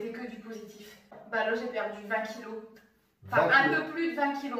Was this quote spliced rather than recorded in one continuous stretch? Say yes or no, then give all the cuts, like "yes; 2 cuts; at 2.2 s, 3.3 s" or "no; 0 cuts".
yes; 1 cut; at 1.2 s